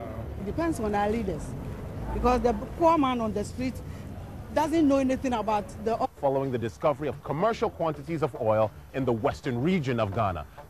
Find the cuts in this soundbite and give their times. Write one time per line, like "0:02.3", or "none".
none